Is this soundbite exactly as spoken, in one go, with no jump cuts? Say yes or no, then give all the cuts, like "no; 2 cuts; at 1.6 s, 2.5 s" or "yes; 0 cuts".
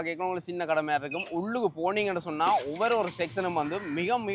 yes; 0 cuts